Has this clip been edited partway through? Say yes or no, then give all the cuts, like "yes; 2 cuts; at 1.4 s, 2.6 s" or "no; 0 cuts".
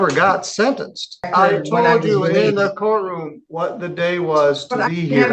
yes; 1 cut; at 1.3 s